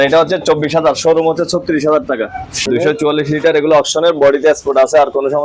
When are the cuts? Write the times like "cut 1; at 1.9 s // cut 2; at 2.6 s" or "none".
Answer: cut 1; at 2.7 s